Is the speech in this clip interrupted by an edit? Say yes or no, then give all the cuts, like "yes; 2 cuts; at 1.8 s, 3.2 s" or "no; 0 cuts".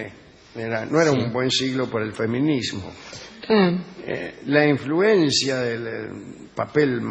no; 0 cuts